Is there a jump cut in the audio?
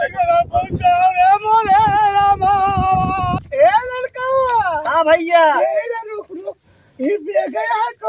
yes; 1 cut; at 3.4 s

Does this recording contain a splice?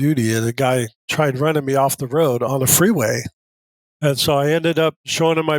yes; 1 cut; at 1.0 s

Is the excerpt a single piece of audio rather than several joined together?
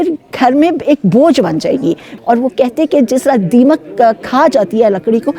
no; 1 cut; at 2.1 s

